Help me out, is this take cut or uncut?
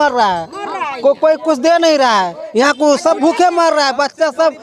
uncut